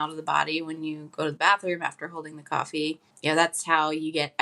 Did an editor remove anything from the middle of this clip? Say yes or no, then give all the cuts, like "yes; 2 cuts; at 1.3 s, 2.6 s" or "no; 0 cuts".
yes; 1 cut; at 3.1 s